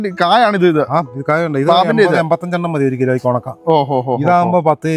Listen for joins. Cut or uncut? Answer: uncut